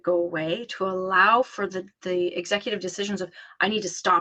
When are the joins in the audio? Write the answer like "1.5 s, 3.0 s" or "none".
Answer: none